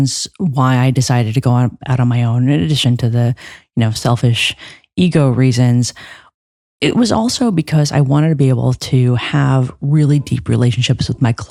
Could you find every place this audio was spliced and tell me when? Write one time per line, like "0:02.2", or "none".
none